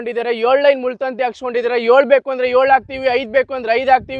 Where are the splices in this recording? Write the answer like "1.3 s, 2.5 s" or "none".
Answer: none